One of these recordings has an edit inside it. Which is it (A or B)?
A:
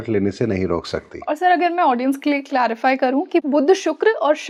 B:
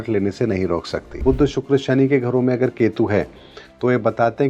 B